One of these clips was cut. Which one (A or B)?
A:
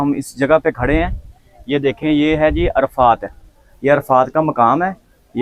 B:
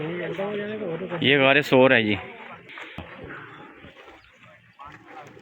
B